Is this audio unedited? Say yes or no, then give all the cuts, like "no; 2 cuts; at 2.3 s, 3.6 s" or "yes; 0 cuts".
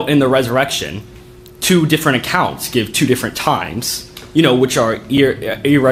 yes; 0 cuts